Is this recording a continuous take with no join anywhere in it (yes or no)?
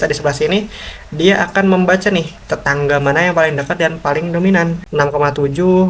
no